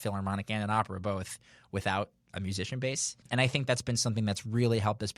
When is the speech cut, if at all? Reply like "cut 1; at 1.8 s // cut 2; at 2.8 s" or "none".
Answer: cut 1; at 2.3 s // cut 2; at 3.2 s

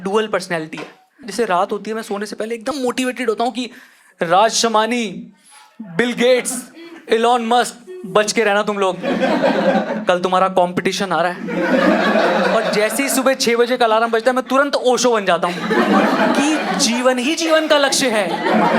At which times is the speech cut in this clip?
cut 1; at 1.3 s // cut 2; at 2.8 s

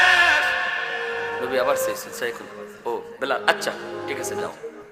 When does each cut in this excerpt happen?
cut 1; at 3.8 s

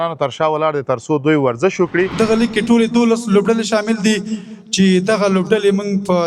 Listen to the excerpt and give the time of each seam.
cut 1; at 2.1 s

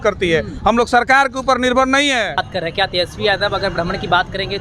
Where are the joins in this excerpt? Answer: cut 1; at 2.5 s

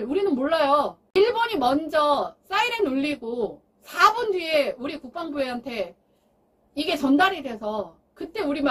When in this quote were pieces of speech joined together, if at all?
cut 1; at 1.1 s

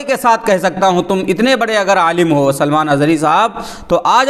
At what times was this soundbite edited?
none

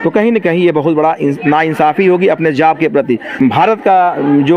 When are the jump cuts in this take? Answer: cut 1; at 3.3 s

